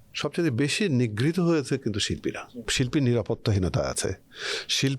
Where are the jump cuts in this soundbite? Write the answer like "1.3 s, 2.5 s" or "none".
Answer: 2.7 s

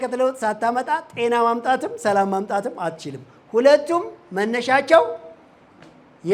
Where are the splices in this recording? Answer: none

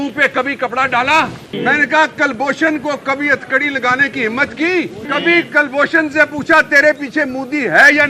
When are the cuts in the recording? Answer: 1.5 s, 5.0 s

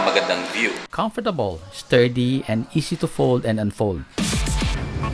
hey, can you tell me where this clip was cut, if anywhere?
1.0 s

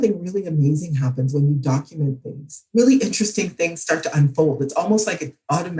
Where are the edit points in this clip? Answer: none

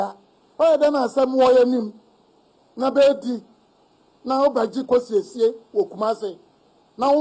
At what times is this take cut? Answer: none

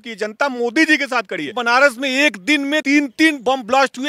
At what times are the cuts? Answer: 1.6 s, 2.8 s

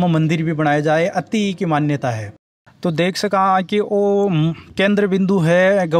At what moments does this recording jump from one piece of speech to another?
none

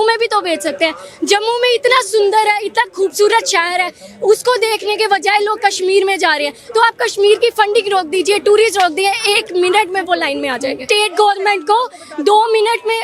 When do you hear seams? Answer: 10.8 s

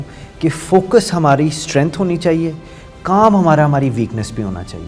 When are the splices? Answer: none

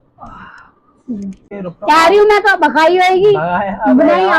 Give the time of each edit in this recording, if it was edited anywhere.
1.5 s

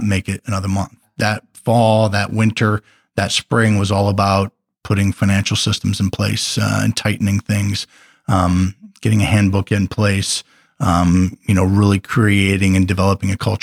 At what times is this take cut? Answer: 1.0 s

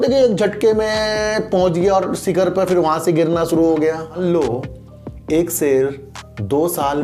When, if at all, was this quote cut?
4.2 s

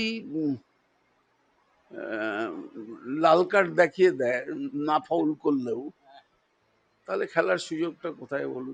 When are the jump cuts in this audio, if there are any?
none

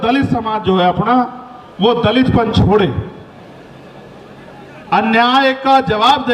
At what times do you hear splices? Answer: none

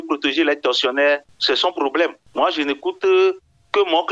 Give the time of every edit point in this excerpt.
1.3 s, 2.2 s

